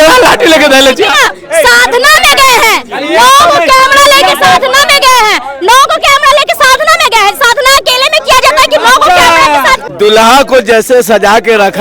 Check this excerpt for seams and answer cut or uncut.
cut